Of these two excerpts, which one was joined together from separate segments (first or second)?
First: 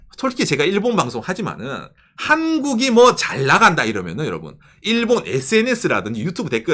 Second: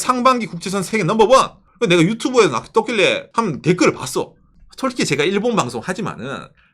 second